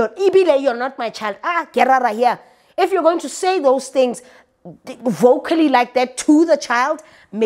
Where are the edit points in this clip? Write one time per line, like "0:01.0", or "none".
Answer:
none